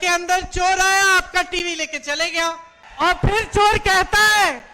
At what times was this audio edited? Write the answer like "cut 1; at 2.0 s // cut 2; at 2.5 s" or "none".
cut 1; at 2.8 s